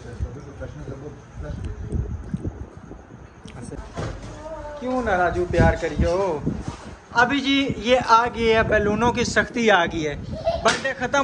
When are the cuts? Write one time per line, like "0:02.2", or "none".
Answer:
0:03.8